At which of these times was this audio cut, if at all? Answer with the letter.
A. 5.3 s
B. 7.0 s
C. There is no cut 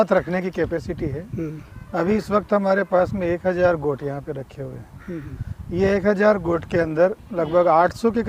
C